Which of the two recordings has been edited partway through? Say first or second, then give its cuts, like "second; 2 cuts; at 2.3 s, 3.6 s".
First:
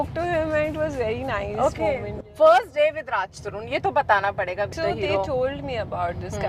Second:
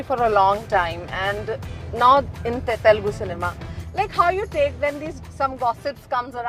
first; 2 cuts; at 2.1 s, 4.7 s